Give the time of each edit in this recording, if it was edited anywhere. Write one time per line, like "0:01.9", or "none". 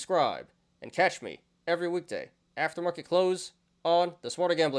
none